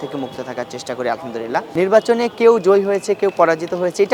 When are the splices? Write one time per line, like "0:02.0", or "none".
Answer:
0:01.7